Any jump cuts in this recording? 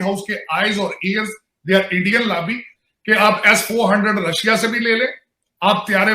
yes; 1 cut; at 2.8 s

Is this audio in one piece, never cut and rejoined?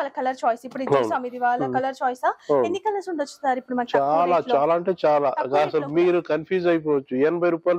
yes; 0 cuts

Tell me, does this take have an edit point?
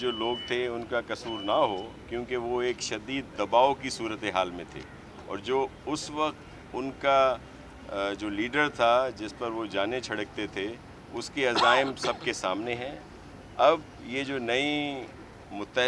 no; 0 cuts

